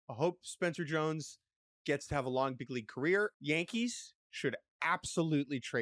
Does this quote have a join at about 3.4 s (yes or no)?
yes